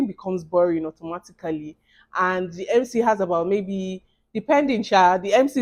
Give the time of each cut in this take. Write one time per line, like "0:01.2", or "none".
none